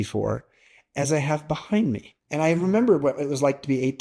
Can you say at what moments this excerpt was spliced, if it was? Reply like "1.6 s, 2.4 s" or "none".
2.1 s